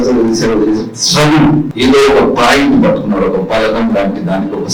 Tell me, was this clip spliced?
yes; 1 cut; at 1.7 s

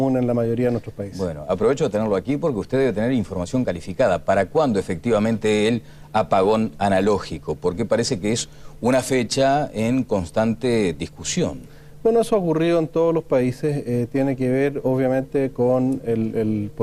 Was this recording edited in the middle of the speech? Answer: no; 0 cuts

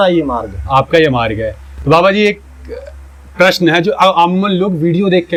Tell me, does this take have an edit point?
no; 0 cuts

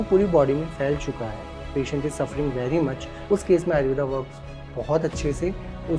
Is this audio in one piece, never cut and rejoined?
no; 1 cut; at 3.1 s

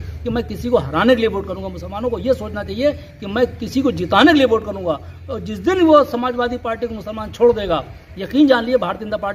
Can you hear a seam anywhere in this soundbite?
no; 0 cuts

